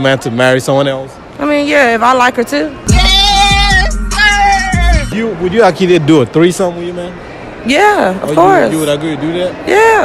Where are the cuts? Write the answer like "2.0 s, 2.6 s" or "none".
2.9 s, 5.1 s